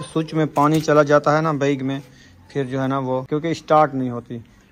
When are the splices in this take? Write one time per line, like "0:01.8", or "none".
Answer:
0:03.3